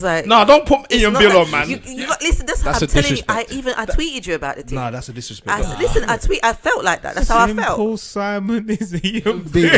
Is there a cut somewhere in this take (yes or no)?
no